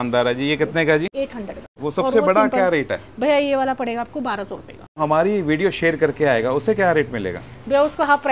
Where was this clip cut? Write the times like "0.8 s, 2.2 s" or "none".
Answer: 1.2 s, 5.0 s